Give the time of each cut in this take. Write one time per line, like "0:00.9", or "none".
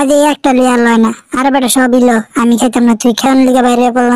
0:03.2

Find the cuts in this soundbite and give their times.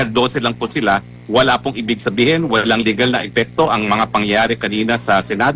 none

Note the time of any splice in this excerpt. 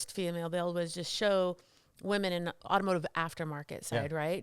0:02.6

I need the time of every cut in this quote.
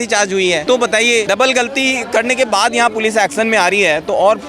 0:01.0

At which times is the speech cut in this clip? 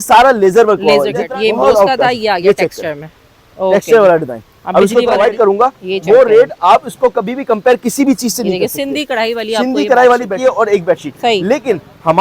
0:01.2
0:05.2
0:10.3

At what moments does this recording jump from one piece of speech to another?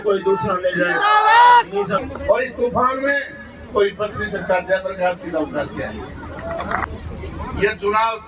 0:02.0
0:06.9

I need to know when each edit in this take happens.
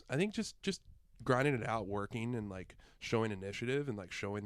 none

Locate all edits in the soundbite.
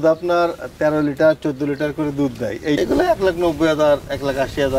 0:02.8

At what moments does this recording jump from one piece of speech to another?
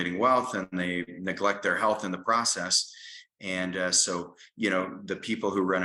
none

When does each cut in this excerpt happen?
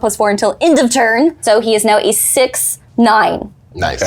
0:01.4

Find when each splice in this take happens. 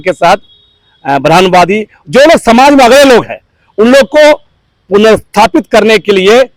none

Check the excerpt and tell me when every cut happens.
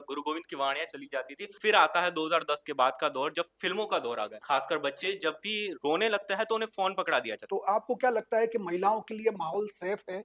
0:01.5
0:04.4
0:07.4

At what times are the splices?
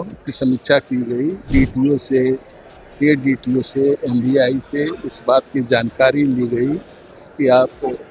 0:01.4

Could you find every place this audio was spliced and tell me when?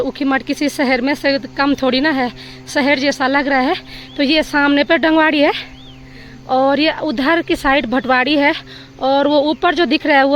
none

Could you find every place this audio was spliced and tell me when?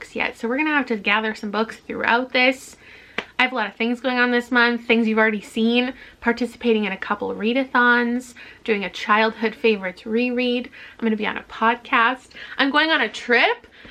none

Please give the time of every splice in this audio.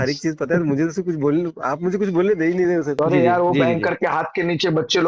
0:03.0

